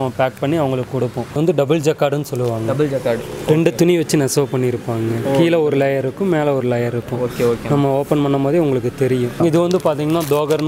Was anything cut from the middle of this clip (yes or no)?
yes